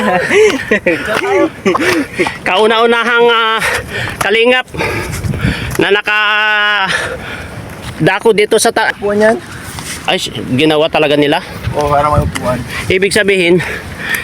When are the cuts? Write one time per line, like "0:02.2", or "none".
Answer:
0:08.9